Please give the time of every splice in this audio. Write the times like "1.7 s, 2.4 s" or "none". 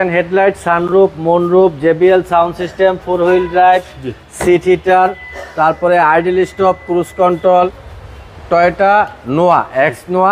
7.9 s